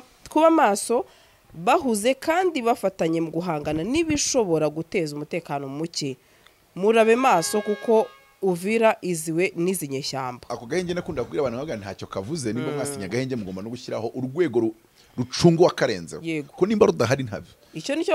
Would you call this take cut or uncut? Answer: cut